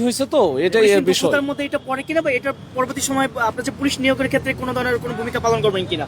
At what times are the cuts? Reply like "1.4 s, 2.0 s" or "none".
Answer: none